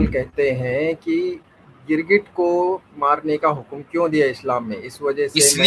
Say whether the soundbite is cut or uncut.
uncut